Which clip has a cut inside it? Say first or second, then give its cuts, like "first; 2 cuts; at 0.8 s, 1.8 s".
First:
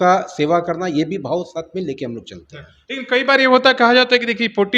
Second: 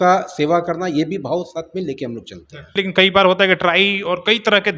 second; 1 cut; at 2.7 s